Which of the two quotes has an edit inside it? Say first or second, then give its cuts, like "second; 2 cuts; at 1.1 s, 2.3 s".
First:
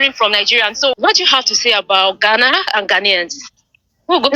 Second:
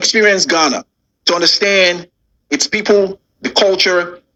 first; 1 cut; at 1.0 s